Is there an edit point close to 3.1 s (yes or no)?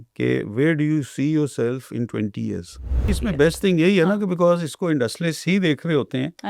yes